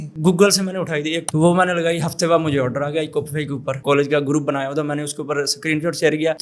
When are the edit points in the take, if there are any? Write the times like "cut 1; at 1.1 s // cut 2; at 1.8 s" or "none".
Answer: cut 1; at 1.2 s // cut 2; at 3.8 s